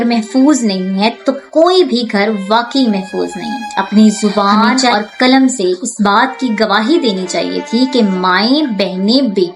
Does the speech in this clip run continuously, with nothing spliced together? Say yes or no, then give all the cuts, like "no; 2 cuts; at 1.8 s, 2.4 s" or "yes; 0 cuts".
no; 1 cut; at 3.6 s